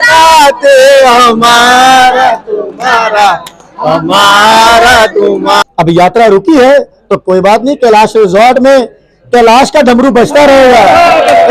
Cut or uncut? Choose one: cut